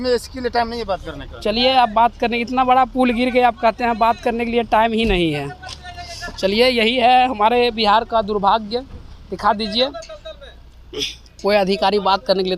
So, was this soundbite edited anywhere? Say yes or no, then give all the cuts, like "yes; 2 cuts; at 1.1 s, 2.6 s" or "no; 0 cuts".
no; 0 cuts